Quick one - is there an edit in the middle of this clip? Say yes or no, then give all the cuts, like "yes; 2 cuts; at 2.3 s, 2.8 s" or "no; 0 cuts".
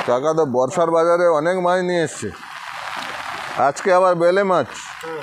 no; 0 cuts